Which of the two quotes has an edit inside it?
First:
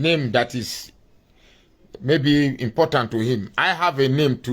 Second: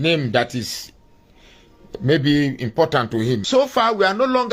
second; 1 cut; at 3.4 s

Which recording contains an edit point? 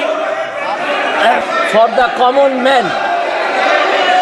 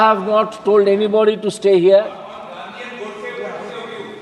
first; 1 cut; at 1.4 s

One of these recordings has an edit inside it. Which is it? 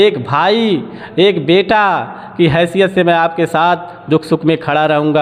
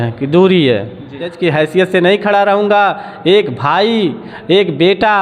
second; 1 cut; at 1.3 s

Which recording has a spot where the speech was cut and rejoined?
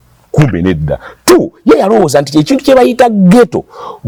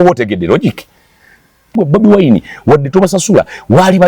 second; 1 cut; at 1.7 s

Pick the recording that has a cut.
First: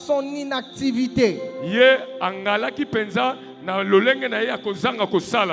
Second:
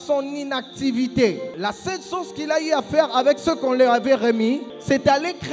second; 2 cuts; at 1.5 s, 4.7 s

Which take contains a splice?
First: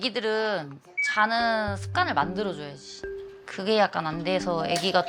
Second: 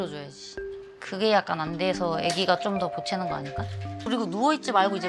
second; 1 cut; at 4.0 s

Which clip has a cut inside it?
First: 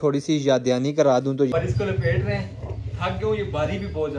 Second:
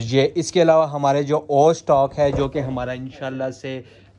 first; 1 cut; at 1.5 s

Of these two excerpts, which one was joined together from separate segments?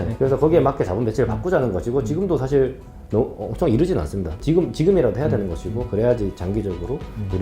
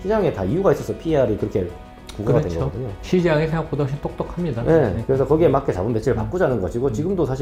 first; 1 cut; at 4.4 s

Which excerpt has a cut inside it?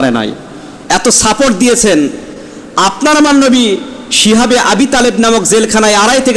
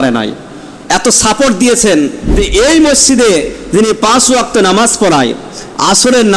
second; 1 cut; at 2.4 s

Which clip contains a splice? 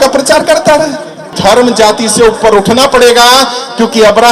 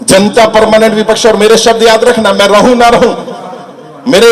first; 1 cut; at 1.3 s

